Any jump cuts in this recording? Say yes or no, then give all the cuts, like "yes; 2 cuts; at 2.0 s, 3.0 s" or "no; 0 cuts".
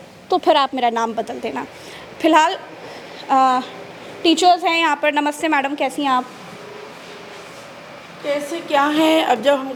no; 0 cuts